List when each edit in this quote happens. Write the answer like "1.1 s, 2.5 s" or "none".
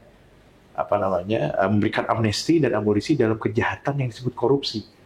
none